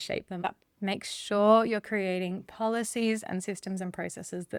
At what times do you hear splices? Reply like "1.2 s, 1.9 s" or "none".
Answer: none